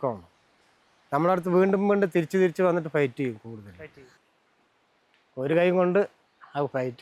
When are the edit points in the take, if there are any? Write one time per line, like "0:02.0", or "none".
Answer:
0:04.1